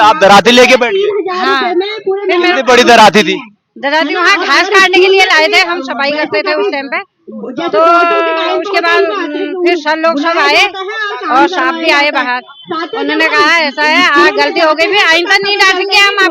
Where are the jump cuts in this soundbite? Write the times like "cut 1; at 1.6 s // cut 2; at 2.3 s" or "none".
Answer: none